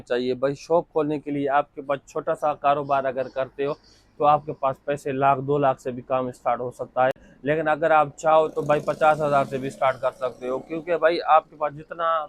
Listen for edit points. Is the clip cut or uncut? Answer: uncut